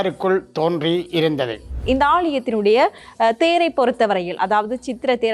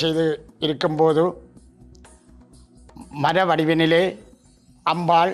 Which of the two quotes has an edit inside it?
first; 1 cut; at 1.8 s

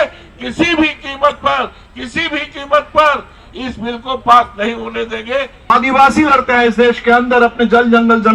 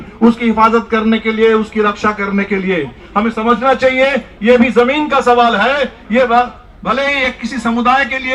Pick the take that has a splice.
first; 1 cut; at 5.7 s

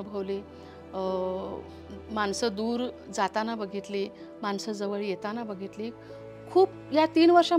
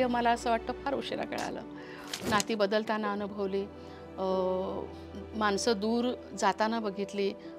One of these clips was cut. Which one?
second; 1 cut; at 2.2 s

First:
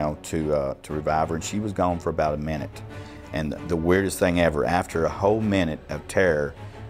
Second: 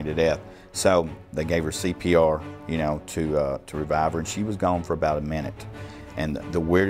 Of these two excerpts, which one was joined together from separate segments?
second; 1 cut; at 1.3 s

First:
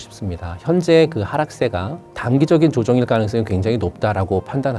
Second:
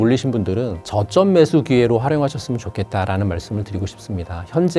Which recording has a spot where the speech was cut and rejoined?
first; 1 cut; at 2.0 s

